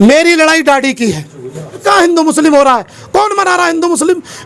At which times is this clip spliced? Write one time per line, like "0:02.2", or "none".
0:01.8